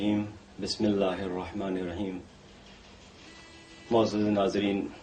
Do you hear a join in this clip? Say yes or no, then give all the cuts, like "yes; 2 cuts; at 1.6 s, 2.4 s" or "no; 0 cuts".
no; 0 cuts